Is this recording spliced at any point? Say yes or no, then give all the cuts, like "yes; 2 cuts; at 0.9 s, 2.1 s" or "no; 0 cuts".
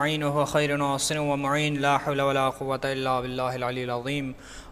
no; 0 cuts